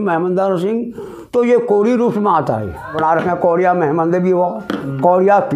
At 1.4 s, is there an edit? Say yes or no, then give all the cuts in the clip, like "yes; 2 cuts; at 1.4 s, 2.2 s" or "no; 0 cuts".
no; 1 cut; at 2.9 s